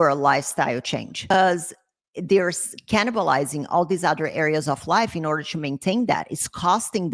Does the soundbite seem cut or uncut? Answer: cut